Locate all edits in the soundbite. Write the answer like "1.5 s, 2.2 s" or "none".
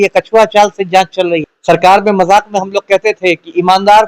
1.5 s